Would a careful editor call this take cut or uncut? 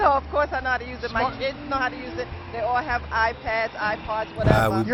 uncut